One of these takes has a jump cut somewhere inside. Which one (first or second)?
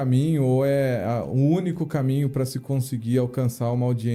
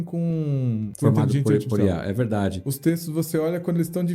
second